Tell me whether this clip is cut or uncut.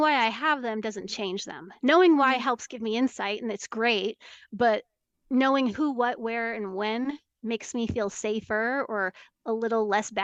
uncut